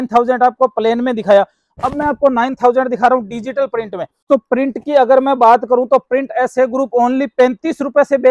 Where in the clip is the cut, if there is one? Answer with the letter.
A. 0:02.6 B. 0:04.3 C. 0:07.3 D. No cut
B